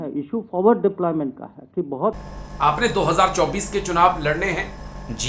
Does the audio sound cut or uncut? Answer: cut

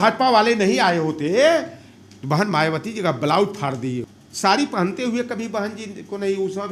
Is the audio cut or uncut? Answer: cut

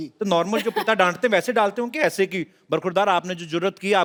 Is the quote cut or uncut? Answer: uncut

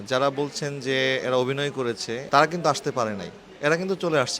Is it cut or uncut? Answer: cut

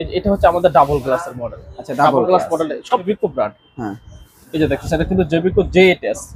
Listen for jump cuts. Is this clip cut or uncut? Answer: cut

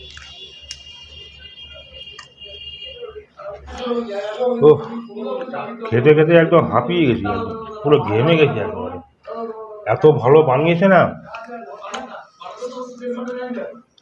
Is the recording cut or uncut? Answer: cut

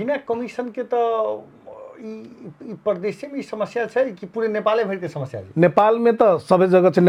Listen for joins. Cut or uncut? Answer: uncut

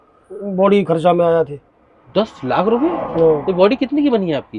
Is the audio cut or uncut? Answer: uncut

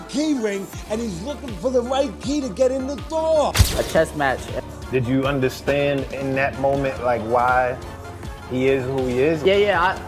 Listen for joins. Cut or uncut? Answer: cut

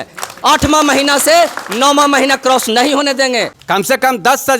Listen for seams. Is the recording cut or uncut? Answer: cut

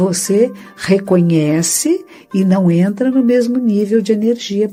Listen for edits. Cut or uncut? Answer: uncut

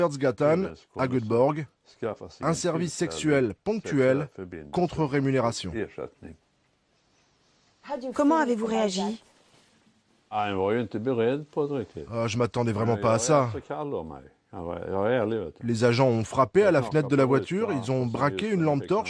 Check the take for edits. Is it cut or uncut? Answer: cut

